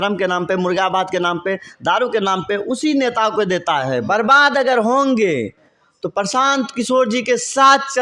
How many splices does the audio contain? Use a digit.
1